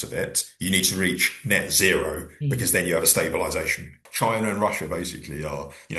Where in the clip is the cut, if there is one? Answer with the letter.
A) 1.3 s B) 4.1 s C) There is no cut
B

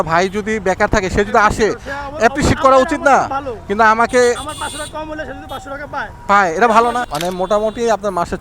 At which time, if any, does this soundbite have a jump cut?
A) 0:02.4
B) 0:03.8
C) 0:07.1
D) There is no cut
C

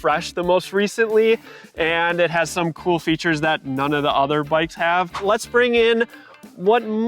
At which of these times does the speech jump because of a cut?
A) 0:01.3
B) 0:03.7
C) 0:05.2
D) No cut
C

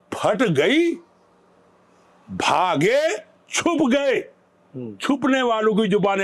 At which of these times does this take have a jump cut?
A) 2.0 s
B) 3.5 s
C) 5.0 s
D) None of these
D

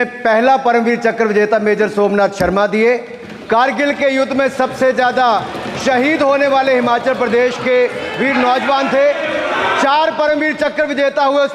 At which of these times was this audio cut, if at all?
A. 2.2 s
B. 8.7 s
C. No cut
C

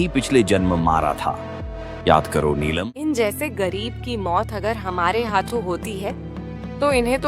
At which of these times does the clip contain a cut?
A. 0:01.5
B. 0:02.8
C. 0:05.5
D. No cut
B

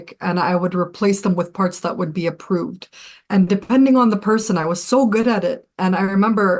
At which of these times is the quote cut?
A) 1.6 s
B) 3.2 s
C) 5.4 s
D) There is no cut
D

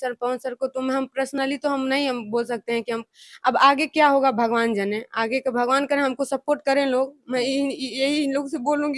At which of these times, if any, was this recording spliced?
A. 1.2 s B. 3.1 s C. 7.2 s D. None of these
D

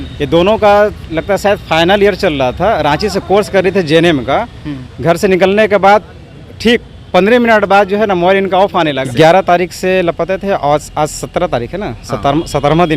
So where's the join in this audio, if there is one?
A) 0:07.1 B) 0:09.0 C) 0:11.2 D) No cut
B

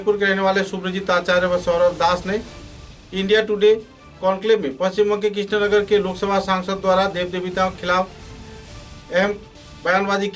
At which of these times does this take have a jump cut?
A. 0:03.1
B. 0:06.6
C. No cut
C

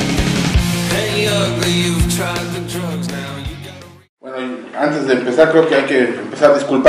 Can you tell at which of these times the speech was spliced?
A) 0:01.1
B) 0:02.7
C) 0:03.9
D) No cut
C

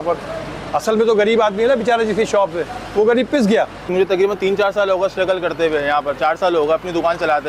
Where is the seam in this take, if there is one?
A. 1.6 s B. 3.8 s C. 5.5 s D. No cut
B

